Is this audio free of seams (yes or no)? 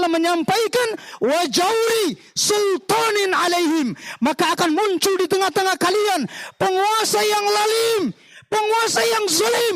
yes